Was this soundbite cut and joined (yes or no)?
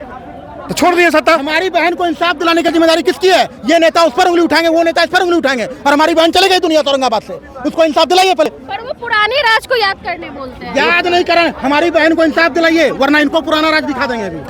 no